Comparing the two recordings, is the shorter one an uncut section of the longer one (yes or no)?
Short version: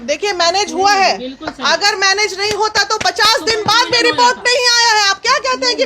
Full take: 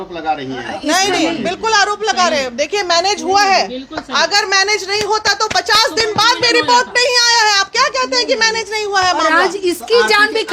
yes